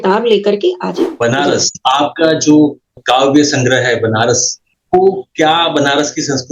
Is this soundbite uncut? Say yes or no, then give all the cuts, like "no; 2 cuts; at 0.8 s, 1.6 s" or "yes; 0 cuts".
no; 1 cut; at 1.0 s